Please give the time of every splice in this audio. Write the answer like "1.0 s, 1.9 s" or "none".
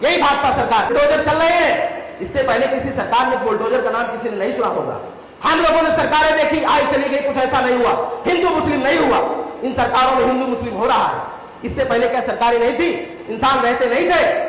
0.9 s